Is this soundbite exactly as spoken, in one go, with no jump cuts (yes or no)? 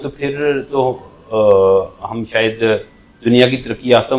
yes